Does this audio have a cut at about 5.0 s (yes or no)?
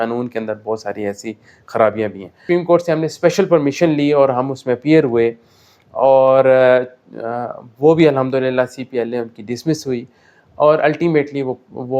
no